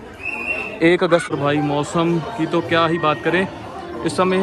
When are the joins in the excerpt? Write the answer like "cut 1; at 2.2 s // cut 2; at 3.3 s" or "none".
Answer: cut 1; at 1.3 s